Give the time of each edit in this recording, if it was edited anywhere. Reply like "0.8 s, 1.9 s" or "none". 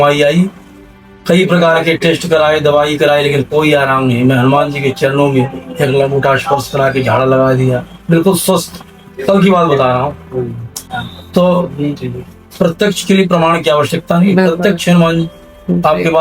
none